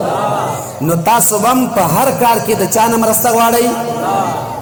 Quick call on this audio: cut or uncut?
uncut